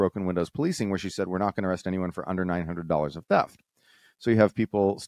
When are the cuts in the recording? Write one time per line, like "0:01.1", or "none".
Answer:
none

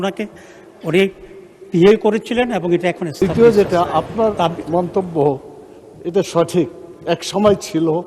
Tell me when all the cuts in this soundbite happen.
0:03.1

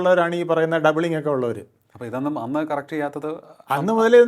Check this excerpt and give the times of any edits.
none

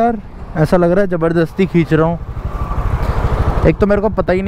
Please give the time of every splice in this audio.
none

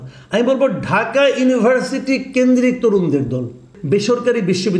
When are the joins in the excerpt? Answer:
0:03.7

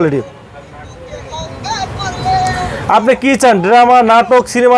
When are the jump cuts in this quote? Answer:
none

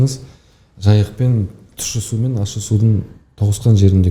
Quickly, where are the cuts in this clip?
none

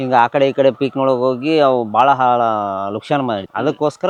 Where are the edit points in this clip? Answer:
none

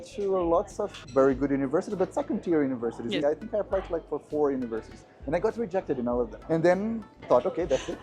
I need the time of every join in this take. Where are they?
0:03.2
0:06.4

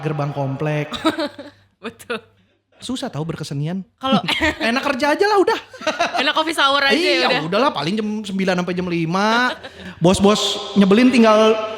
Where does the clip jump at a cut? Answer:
0:02.7

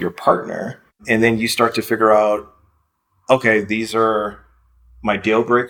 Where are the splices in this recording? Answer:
0:01.0

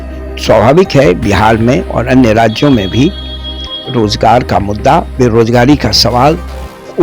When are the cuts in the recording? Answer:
none

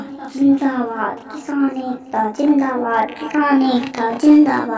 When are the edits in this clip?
none

